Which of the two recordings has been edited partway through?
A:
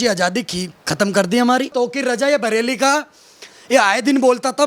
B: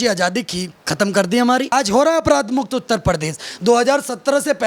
B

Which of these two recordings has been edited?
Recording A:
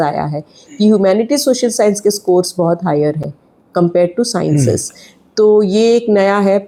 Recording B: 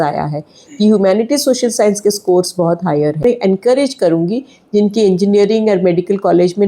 B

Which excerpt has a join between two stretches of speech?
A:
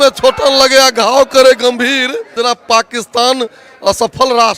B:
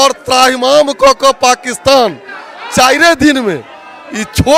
A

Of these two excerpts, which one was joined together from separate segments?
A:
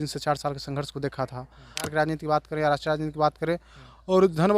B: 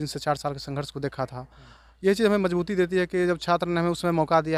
A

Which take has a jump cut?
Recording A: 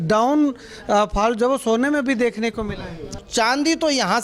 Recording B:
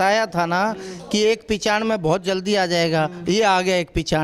A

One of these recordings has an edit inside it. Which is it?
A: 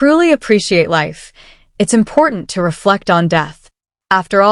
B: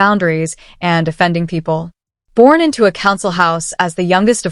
B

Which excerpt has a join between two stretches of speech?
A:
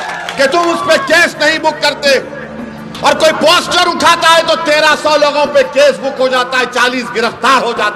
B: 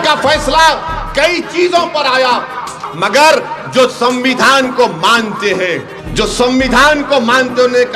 B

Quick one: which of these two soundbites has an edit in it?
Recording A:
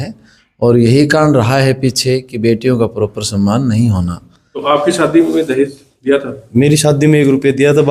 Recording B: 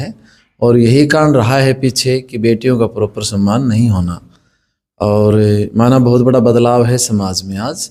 A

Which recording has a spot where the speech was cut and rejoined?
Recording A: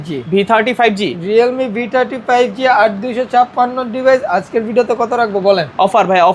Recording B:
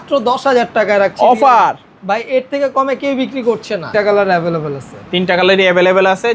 B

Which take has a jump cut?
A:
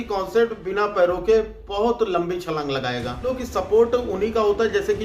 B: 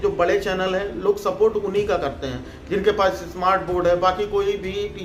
A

